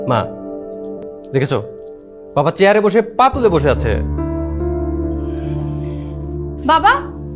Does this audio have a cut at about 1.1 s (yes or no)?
yes